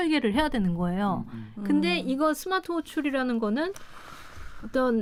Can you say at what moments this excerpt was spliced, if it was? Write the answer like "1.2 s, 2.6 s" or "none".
none

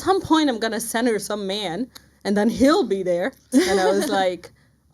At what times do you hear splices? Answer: 3.4 s

